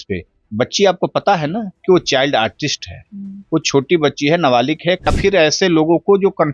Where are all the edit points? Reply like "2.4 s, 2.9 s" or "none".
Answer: 5.1 s